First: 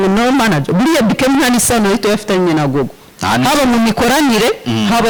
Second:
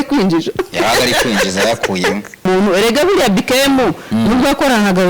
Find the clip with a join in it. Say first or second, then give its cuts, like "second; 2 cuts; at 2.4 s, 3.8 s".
second; 1 cut; at 2.4 s